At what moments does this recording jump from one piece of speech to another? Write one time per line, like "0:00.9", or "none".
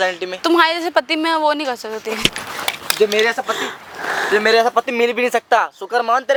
none